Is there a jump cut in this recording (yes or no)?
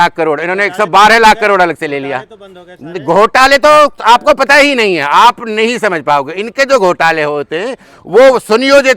no